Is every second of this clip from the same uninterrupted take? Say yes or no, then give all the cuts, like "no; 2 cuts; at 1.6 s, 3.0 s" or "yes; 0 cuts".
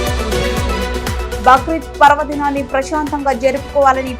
yes; 0 cuts